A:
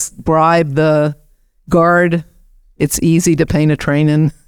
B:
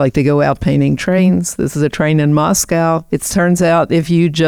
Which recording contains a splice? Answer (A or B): B